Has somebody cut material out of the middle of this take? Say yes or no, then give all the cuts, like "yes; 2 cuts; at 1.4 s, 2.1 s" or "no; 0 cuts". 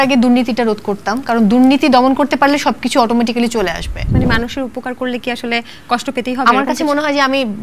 yes; 1 cut; at 3.9 s